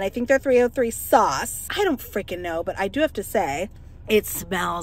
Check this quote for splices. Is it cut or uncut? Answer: cut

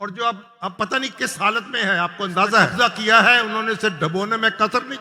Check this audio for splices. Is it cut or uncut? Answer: cut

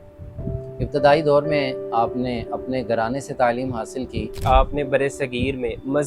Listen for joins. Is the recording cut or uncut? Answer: cut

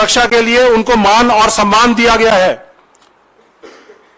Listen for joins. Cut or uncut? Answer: uncut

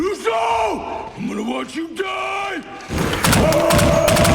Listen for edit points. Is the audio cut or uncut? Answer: cut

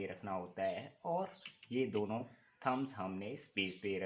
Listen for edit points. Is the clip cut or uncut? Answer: uncut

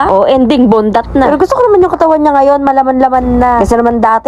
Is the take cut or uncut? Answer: uncut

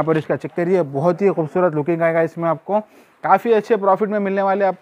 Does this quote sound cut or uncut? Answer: uncut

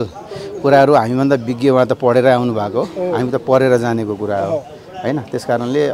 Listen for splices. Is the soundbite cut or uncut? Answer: uncut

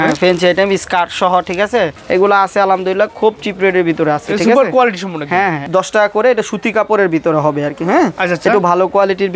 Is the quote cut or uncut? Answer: cut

